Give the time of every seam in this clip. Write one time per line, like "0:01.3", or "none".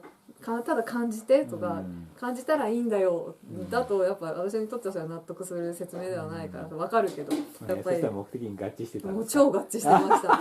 0:07.7